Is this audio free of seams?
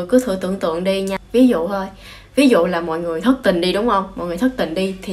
no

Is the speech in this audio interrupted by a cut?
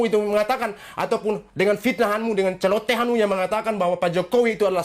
no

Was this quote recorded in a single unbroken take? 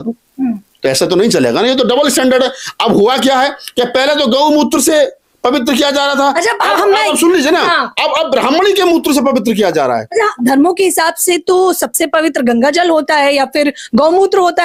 yes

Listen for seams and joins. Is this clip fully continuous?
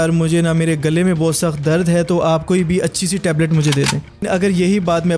no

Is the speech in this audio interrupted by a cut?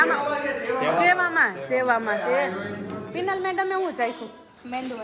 no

